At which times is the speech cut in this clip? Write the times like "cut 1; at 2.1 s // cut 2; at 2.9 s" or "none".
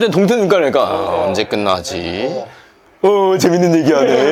none

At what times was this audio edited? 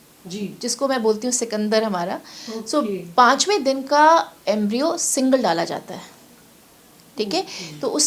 none

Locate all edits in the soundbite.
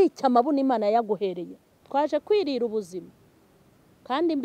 cut 1; at 1.8 s

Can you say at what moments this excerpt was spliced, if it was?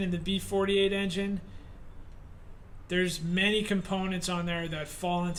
none

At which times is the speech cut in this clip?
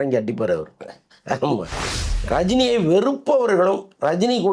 cut 1; at 1.8 s

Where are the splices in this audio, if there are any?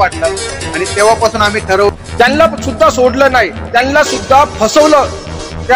cut 1; at 1.9 s

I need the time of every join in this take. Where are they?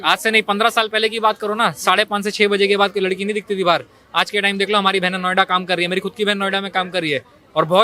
none

